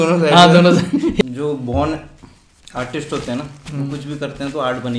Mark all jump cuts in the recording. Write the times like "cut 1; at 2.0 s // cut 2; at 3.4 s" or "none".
cut 1; at 1.3 s